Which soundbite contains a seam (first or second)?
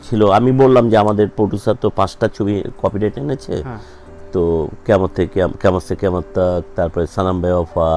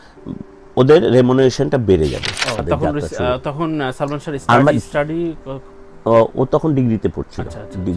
second